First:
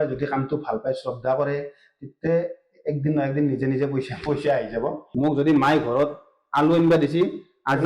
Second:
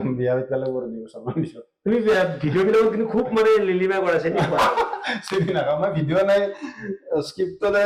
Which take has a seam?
first; 1 cut; at 5.0 s

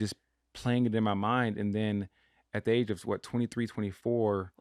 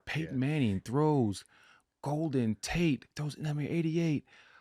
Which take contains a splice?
second; 1 cut; at 3.2 s

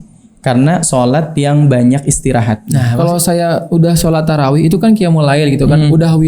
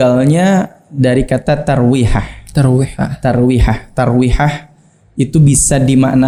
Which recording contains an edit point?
first; 1 cut; at 2.9 s

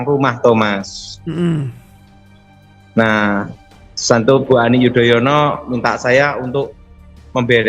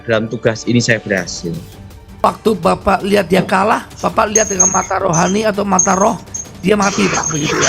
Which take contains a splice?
second; 1 cut; at 2.2 s

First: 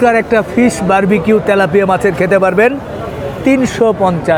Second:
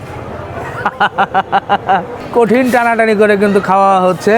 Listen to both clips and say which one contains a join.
second; 1 cut; at 2.2 s

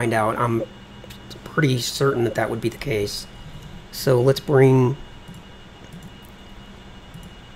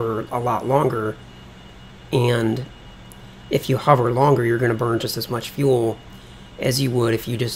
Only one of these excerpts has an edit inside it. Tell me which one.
first; 1 cut; at 1.7 s

